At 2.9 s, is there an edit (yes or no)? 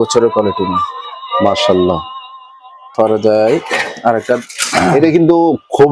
yes